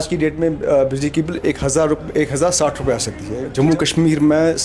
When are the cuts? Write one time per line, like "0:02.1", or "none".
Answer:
0:03.5